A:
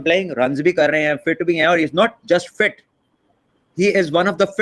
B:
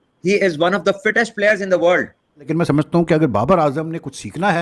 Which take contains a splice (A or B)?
B